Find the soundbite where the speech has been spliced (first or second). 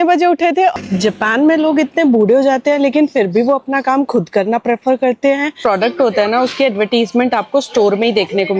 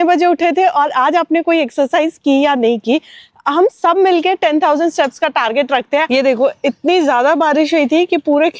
first